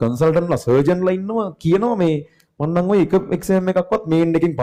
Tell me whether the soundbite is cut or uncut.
uncut